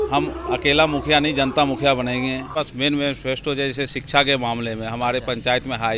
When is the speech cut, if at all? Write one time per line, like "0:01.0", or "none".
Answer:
0:02.5

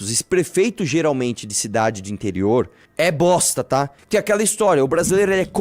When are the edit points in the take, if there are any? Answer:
0:04.0

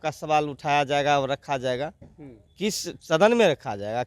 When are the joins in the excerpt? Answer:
none

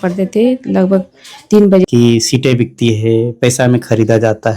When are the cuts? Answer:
0:01.9

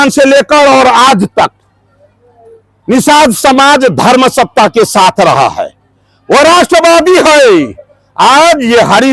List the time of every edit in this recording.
none

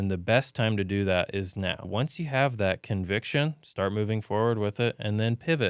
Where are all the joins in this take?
0:01.9

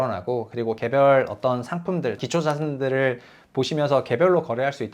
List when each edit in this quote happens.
0:02.2

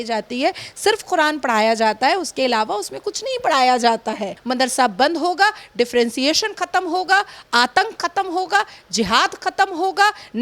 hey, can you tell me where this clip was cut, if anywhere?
0:04.3

